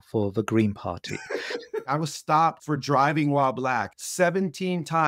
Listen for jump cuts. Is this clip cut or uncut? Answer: cut